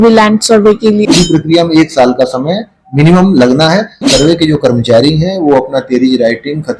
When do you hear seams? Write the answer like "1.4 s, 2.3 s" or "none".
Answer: 1.1 s, 4.0 s